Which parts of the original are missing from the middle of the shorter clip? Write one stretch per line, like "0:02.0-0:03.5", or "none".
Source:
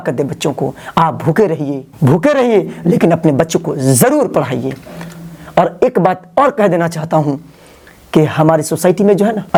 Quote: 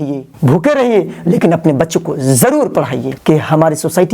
0:04.7-0:08.0